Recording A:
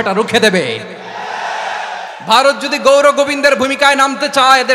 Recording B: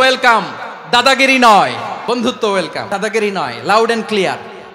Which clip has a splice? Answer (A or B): B